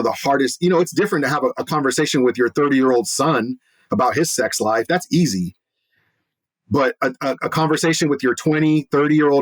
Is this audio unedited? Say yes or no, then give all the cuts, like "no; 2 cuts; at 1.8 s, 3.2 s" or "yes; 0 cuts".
yes; 0 cuts